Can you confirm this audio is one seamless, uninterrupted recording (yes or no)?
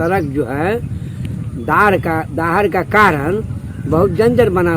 yes